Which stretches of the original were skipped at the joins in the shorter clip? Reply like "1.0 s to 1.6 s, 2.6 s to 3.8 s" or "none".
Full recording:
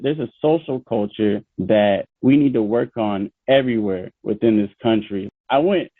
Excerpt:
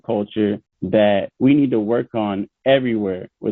none